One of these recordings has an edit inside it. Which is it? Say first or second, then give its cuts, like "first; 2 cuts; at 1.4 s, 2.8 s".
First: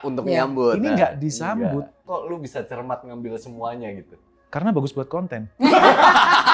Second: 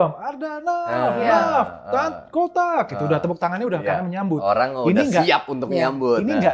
first; 1 cut; at 2.0 s